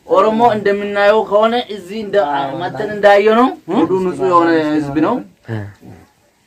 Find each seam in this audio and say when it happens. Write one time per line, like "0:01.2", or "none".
0:03.8